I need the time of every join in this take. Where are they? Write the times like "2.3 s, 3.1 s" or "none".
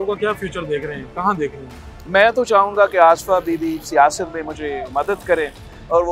none

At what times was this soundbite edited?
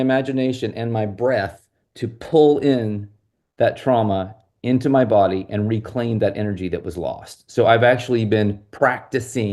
none

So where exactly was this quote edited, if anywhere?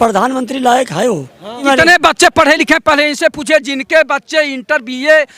1.6 s

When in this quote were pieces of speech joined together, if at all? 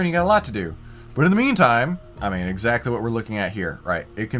2.1 s

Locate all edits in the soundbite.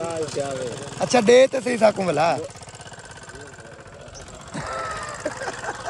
none

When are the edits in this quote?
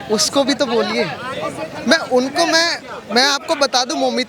none

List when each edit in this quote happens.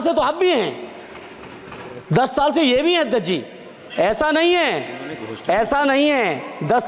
none

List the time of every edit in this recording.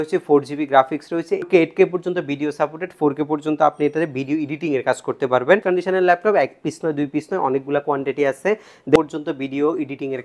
1.4 s, 5.6 s, 9.0 s

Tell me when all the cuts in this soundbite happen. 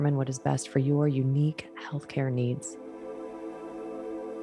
2.7 s

